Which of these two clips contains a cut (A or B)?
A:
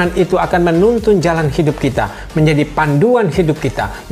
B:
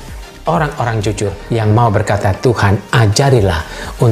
B